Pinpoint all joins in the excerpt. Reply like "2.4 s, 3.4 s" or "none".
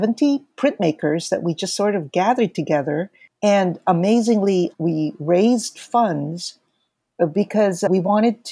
3.2 s